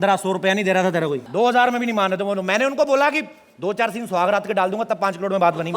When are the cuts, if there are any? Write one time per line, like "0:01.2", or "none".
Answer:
0:01.2